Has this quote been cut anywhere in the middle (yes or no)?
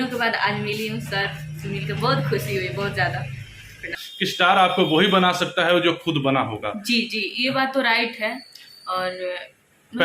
yes